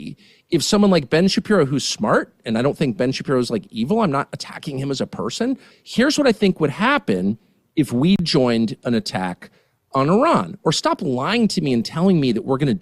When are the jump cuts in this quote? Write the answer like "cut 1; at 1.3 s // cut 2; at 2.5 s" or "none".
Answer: cut 1; at 5.7 s